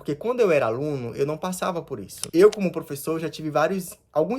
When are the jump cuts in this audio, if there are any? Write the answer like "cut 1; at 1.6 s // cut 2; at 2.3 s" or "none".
cut 1; at 2.2 s

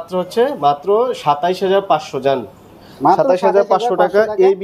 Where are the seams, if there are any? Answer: none

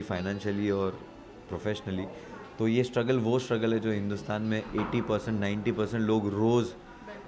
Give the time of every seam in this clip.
none

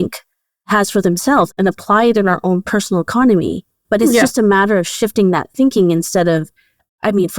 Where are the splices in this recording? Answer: cut 1; at 3.7 s

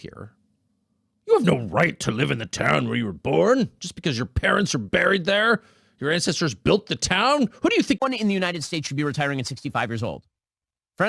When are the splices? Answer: cut 1; at 8.0 s

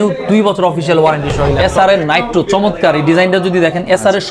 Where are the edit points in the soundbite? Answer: cut 1; at 1.5 s

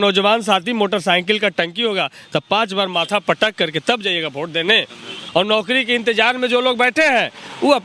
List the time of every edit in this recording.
cut 1; at 5.2 s

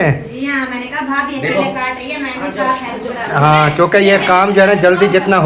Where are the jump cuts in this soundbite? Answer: none

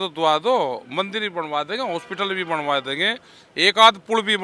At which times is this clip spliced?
none

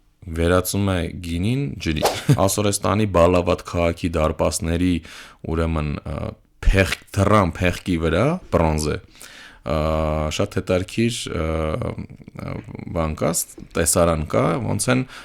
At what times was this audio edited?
cut 1; at 2.4 s

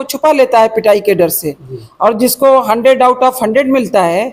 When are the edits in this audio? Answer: none

